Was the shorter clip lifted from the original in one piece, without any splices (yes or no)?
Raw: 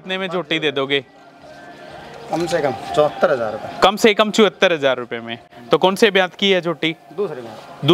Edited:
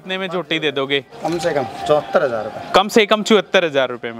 no